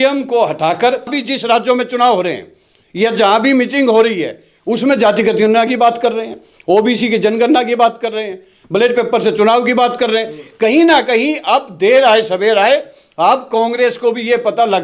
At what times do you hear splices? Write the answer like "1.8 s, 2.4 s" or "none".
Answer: 1.2 s